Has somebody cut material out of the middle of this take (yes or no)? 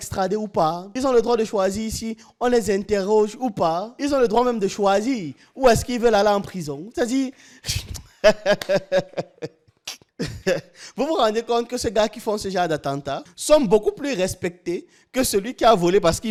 no